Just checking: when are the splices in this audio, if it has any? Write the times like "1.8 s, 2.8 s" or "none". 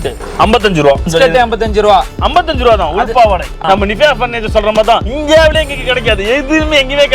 1.1 s, 3.6 s